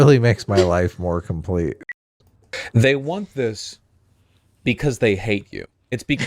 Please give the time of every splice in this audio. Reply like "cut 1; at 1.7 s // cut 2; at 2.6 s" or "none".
cut 1; at 2.0 s